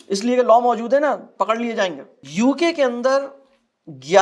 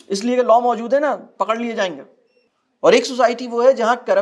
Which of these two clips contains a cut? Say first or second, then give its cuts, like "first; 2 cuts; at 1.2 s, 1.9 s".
second; 1 cut; at 2.2 s